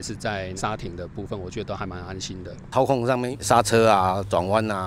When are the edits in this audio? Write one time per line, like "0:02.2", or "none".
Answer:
0:02.6